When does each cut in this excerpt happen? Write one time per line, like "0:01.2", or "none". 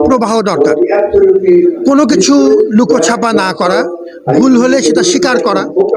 none